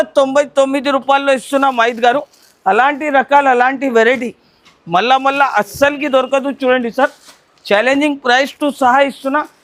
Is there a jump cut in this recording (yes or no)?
no